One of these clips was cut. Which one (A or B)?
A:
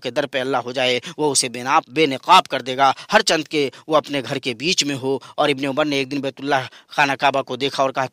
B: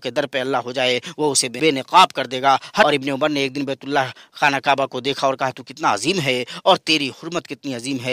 B